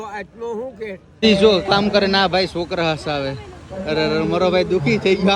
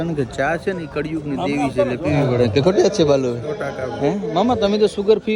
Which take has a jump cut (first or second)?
first